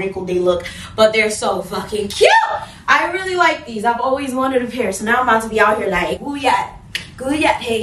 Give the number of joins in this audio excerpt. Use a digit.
0